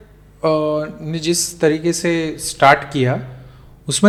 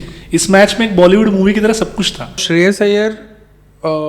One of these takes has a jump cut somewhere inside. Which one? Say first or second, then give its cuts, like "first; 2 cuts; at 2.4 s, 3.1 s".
second; 1 cut; at 2.4 s